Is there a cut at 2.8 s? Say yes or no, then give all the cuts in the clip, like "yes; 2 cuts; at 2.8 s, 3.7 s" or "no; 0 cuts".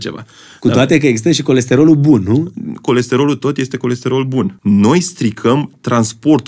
no; 1 cut; at 4.5 s